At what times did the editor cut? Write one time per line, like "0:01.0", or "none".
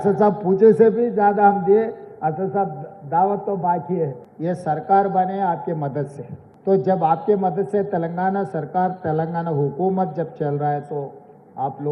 0:04.3